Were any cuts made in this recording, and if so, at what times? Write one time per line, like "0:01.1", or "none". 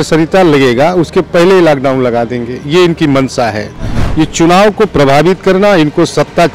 0:04.0